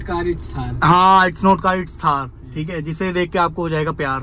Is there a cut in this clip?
no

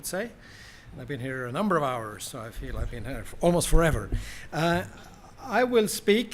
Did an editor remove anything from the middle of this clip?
yes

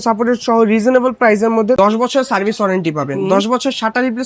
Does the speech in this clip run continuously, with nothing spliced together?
no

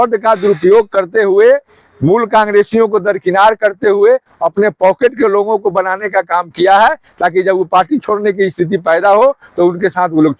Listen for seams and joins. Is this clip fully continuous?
yes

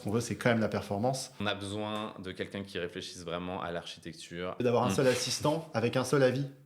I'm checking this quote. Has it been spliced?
yes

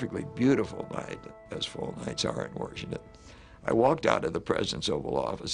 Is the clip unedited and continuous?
no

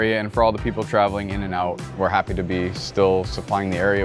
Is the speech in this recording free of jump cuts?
no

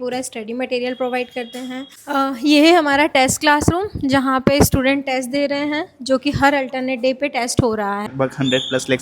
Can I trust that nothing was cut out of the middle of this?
no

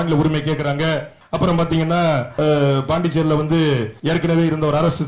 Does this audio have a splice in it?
yes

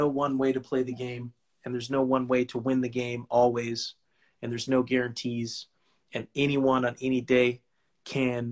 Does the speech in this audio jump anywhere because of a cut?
no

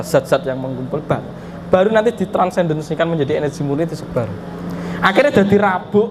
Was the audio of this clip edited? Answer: no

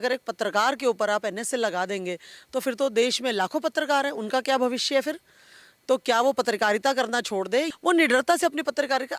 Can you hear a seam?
yes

